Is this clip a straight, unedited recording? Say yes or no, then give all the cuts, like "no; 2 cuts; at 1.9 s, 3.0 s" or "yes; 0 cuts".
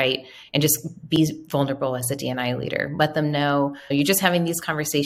no; 1 cut; at 3.9 s